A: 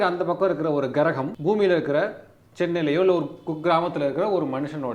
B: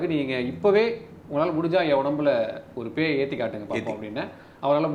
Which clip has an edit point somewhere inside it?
A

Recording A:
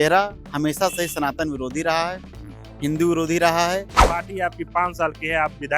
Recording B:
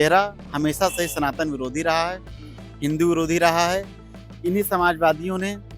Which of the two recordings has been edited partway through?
A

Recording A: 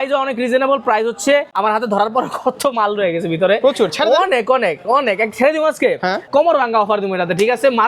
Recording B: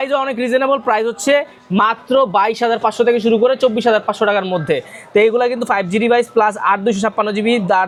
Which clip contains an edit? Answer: A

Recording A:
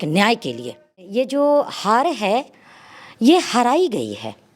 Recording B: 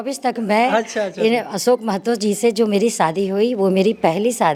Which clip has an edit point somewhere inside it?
A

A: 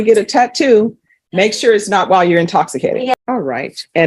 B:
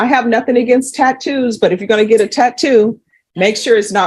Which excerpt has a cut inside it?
A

